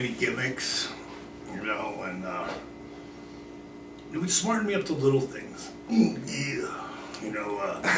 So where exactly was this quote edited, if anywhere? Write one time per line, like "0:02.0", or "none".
0:02.5